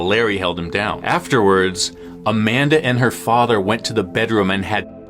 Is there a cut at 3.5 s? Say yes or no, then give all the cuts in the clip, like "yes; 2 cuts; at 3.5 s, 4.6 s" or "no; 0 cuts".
no; 1 cut; at 1.0 s